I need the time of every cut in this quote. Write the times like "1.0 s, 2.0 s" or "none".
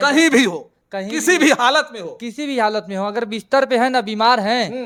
none